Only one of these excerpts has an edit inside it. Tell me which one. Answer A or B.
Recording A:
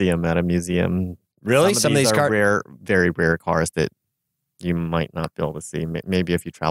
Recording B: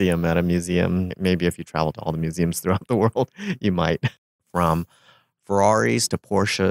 B